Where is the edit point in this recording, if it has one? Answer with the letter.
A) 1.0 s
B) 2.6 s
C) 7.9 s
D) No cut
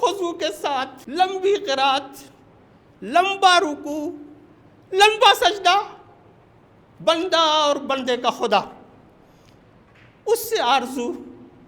A